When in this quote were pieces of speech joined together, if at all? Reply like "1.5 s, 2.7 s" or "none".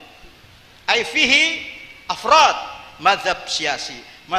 none